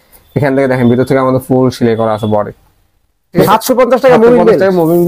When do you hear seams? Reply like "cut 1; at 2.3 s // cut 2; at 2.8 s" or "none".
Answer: cut 1; at 3.4 s